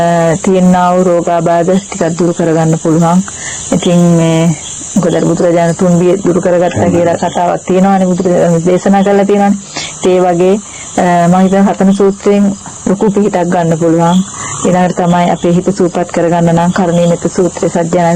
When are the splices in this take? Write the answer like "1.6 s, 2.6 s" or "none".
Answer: none